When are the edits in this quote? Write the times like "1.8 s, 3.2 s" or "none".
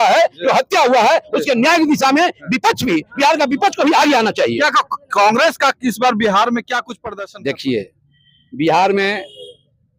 7.0 s